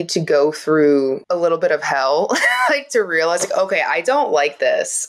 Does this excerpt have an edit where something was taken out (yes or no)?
yes